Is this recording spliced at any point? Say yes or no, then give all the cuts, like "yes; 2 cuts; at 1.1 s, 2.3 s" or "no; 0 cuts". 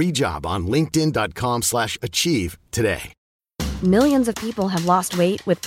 no; 0 cuts